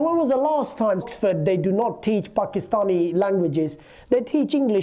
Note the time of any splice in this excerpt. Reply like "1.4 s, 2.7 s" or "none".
1.1 s